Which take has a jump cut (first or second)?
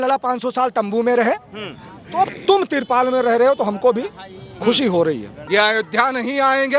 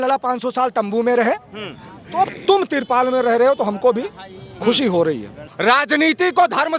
first